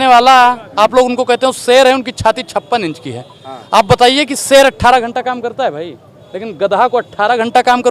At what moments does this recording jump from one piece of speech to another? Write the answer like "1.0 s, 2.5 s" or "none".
none